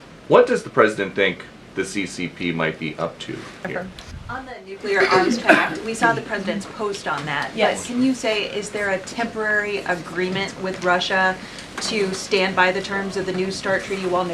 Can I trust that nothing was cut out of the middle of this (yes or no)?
no